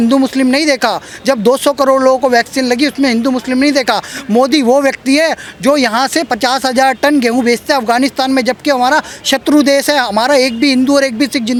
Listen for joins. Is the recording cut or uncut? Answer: uncut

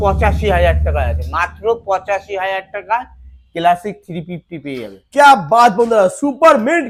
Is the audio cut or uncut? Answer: uncut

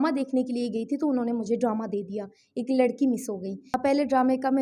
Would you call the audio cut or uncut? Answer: cut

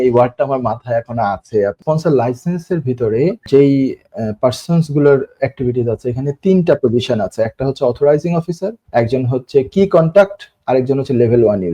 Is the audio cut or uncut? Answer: cut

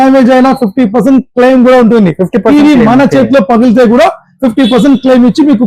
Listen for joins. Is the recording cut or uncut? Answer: uncut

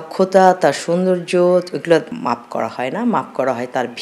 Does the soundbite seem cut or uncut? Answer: uncut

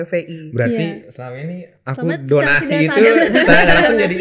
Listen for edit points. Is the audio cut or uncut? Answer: uncut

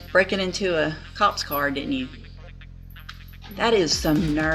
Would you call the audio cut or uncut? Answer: uncut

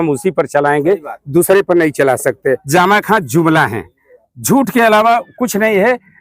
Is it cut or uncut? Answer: cut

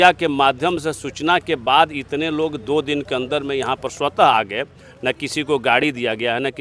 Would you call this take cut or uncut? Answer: uncut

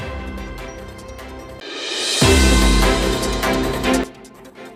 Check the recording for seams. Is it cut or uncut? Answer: uncut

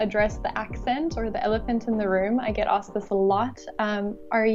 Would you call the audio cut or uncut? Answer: uncut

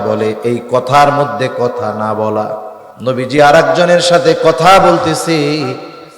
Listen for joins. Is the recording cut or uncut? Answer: cut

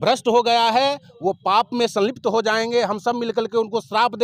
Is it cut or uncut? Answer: uncut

